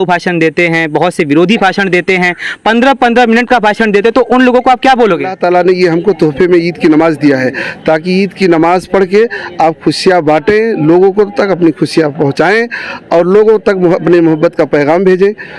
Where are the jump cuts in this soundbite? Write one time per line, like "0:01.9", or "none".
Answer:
0:05.4